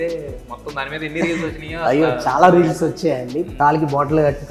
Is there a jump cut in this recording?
yes; 1 cut; at 3.5 s

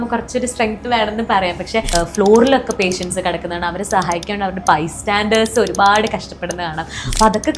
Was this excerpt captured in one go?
no; 1 cut; at 1.9 s

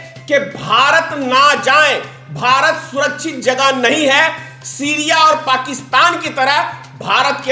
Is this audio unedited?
yes; 0 cuts

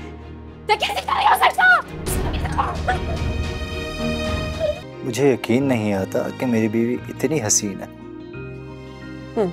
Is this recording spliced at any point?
yes; 1 cut; at 4.9 s

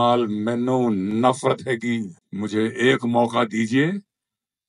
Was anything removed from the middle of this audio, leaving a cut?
yes; 1 cut; at 2.2 s

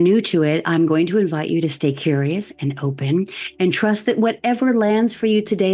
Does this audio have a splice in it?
no; 0 cuts

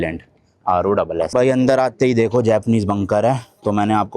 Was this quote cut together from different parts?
yes; 1 cut; at 1.3 s

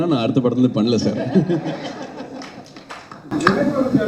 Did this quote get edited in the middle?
no; 0 cuts

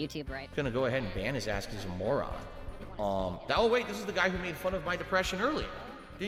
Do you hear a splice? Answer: no; 0 cuts

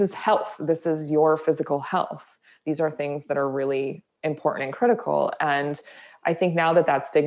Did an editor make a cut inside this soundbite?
no; 0 cuts

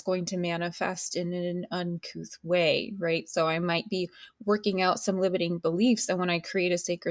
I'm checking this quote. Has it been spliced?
no; 0 cuts

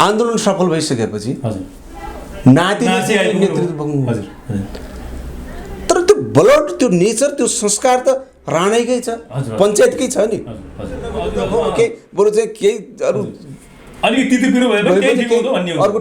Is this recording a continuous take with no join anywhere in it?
no; 1 cut; at 11.1 s

